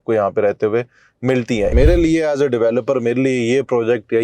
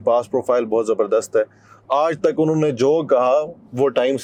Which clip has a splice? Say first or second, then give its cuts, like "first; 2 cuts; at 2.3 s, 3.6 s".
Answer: first; 1 cut; at 1.7 s